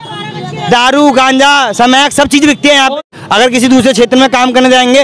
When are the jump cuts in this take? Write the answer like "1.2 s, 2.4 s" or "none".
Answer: 3.0 s